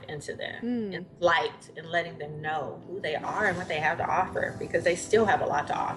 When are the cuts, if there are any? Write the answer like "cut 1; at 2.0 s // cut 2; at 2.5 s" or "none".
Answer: none